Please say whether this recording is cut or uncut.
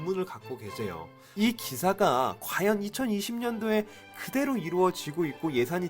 cut